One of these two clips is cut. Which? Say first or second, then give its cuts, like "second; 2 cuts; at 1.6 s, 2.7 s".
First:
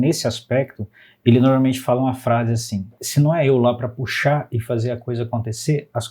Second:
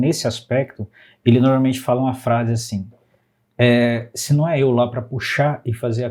first; 1 cut; at 3.0 s